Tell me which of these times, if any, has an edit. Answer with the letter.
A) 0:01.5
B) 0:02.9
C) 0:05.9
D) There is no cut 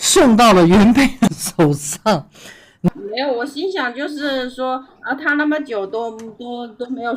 B